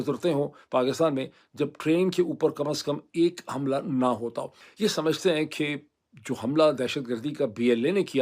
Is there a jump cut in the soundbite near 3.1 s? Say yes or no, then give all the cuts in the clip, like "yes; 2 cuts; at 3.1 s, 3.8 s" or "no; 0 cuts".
no; 1 cut; at 4.6 s